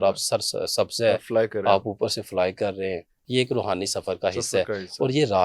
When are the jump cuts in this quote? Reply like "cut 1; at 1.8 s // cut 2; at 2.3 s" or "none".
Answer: cut 1; at 3.2 s